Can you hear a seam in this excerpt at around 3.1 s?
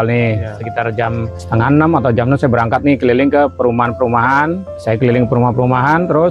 no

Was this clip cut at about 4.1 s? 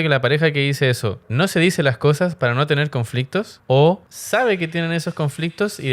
yes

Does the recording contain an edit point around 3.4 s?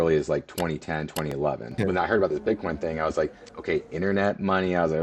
no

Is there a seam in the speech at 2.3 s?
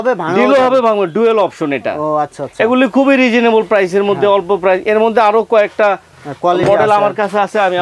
no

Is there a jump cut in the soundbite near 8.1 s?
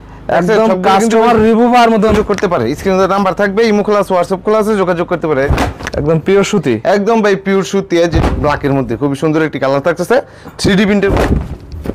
yes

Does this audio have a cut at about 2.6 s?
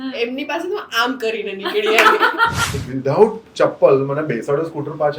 yes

